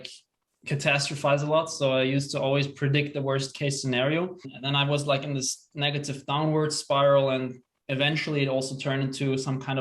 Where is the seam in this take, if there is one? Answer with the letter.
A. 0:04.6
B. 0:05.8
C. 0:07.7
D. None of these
A